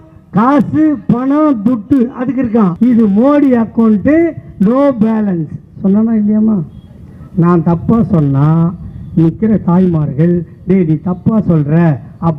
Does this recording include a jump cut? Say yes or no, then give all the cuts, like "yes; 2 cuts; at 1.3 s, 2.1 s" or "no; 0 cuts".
yes; 1 cut; at 2.7 s